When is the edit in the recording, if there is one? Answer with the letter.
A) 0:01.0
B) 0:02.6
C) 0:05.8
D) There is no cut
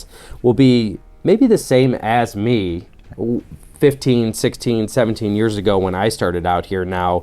A